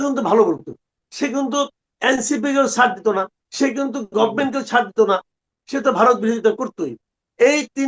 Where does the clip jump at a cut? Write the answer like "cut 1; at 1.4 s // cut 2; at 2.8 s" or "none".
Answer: cut 1; at 1.0 s // cut 2; at 3.4 s